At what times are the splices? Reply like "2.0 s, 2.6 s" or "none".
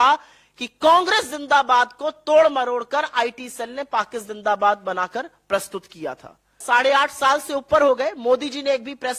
6.6 s